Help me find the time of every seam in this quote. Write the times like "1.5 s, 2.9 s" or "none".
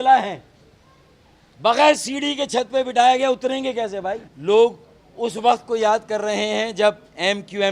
4.3 s